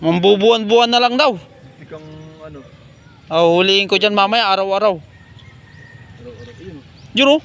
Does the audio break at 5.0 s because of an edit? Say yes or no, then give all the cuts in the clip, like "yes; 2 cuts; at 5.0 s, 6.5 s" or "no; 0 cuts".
no; 0 cuts